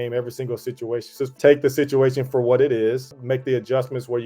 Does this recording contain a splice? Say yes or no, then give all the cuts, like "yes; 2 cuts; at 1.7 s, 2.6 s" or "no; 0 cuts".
yes; 2 cuts; at 1.4 s, 3.1 s